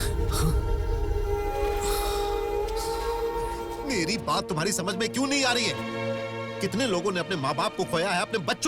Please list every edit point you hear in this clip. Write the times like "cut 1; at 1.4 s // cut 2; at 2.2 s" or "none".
cut 1; at 3.8 s